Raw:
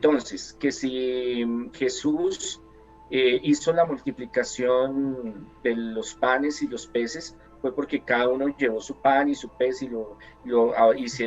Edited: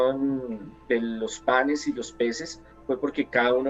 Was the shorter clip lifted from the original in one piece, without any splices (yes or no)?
yes